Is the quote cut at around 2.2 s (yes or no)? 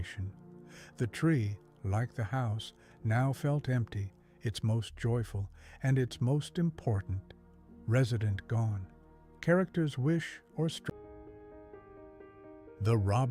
no